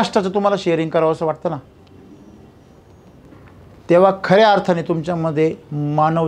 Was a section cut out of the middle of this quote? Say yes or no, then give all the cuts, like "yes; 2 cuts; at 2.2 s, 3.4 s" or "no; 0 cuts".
no; 0 cuts